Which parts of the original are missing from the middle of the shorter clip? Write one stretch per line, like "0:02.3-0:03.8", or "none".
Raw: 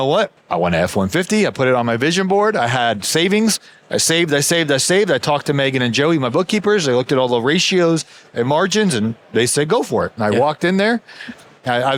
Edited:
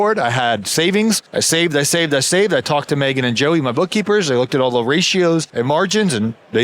0:03.6-0:03.8
0:08.1-0:08.3

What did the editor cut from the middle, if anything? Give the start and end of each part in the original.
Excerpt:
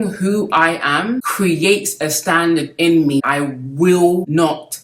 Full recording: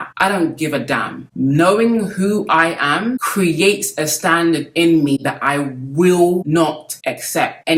0:05.2-0:05.4

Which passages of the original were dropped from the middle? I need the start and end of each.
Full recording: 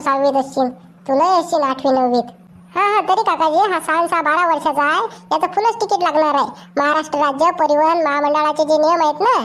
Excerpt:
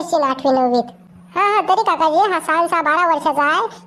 none

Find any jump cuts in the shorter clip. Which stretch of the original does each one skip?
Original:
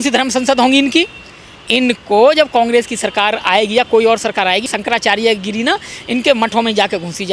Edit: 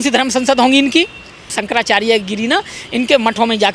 0:01.5-0:04.7

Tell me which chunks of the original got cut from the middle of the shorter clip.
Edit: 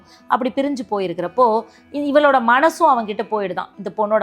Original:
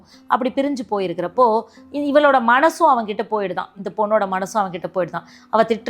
none

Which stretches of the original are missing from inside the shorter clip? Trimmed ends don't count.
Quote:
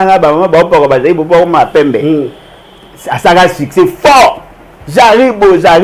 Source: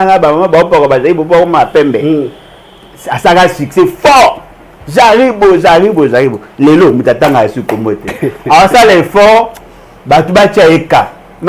none

